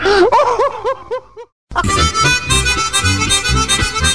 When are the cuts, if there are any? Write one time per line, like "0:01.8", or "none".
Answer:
none